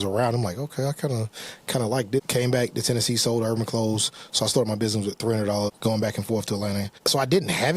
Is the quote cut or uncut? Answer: cut